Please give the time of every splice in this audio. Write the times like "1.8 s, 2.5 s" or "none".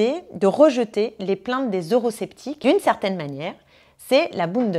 2.5 s